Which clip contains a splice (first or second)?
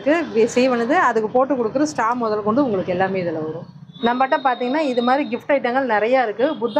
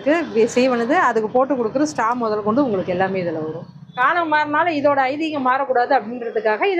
second